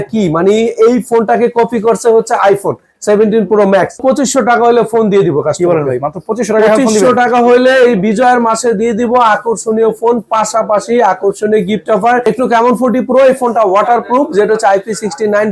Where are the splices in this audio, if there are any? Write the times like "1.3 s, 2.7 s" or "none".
4.0 s, 12.2 s